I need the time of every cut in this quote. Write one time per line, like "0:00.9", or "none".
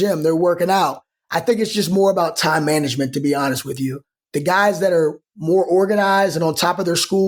none